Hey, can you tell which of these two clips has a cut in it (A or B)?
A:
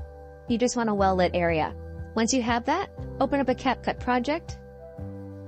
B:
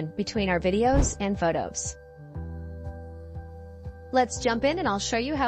B